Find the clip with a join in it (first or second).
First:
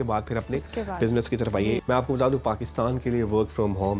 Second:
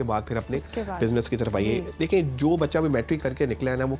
first